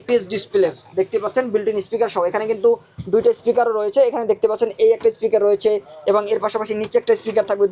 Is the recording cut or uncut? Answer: uncut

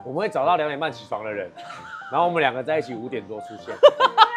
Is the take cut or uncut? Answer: uncut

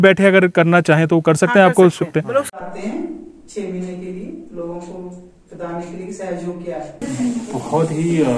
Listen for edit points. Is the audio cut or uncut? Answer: cut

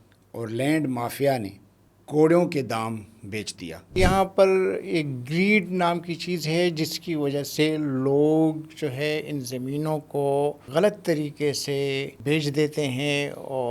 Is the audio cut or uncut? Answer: cut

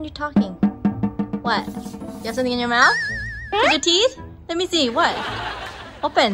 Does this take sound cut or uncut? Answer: uncut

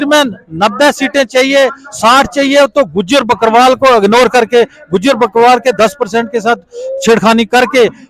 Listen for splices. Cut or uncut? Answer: uncut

